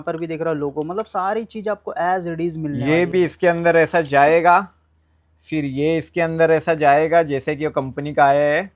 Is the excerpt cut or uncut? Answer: uncut